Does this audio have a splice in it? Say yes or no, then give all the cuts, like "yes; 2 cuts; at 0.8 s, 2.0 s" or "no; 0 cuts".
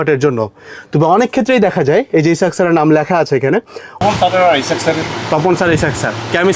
yes; 1 cut; at 4.0 s